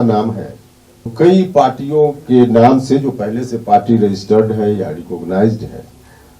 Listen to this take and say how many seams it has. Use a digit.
1